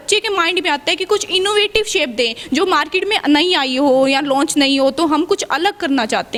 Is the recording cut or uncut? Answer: uncut